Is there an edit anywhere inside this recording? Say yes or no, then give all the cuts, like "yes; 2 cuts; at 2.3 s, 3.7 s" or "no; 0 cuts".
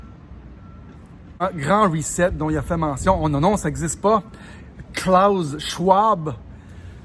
yes; 1 cut; at 1.4 s